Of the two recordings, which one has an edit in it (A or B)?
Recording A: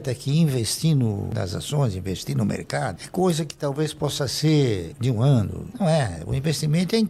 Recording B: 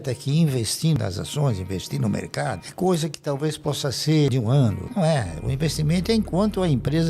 B